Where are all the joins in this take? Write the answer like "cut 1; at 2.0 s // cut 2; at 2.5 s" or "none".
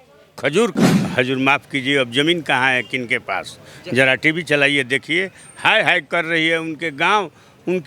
cut 1; at 1.0 s